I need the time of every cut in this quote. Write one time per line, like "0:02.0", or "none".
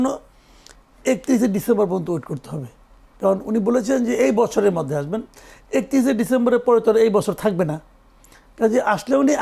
none